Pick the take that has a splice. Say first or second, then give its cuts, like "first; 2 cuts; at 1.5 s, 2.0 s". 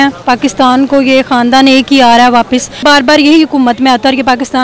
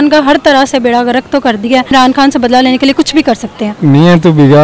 second; 2 cuts; at 1.9 s, 3.7 s